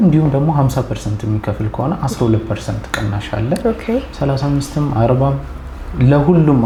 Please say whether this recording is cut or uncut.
uncut